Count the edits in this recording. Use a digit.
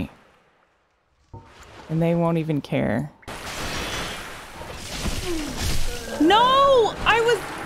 1